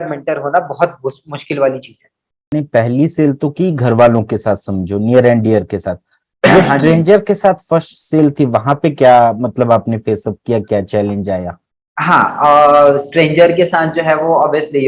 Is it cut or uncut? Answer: cut